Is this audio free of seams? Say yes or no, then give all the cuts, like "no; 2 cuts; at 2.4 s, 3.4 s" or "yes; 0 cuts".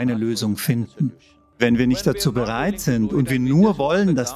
no; 1 cut; at 1.6 s